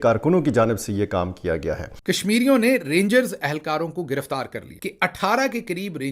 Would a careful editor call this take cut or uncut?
cut